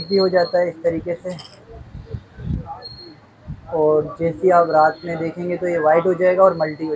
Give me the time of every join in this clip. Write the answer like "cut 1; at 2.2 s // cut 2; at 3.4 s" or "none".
none